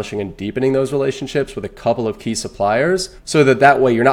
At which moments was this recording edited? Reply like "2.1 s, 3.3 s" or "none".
3.2 s

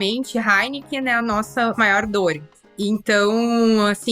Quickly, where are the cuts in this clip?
1.7 s, 2.6 s

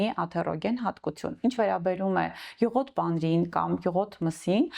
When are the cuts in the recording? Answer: none

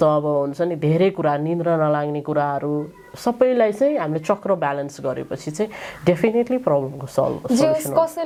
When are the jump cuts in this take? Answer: none

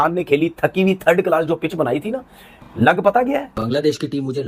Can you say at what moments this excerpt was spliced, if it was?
3.5 s

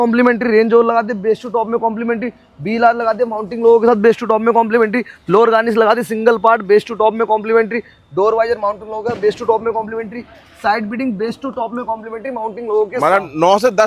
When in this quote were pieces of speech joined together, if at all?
none

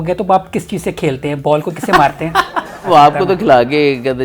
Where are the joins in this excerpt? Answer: 2.9 s

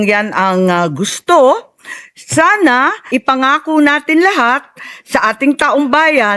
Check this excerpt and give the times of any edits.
3.0 s

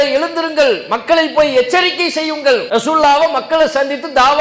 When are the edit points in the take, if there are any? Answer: 2.7 s

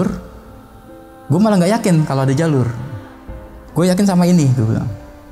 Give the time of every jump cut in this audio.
none

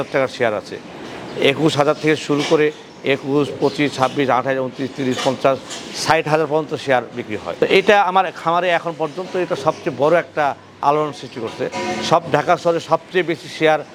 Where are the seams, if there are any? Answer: none

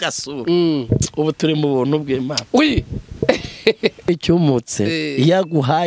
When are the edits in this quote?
4.1 s

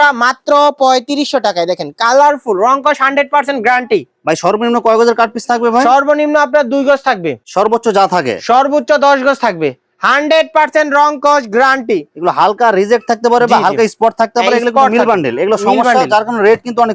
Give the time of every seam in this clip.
none

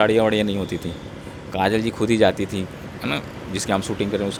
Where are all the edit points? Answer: none

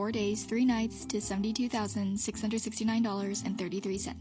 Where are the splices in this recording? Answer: none

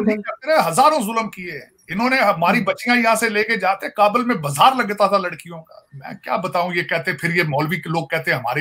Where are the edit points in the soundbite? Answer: none

